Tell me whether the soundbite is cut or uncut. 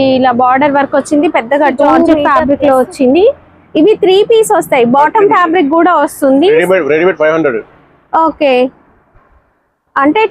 cut